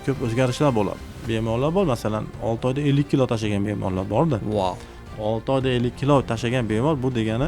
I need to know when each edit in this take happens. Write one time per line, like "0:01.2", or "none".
0:01.0
0:05.2